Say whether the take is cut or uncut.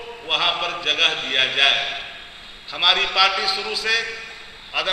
uncut